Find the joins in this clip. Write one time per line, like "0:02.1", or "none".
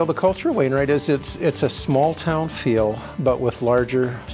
none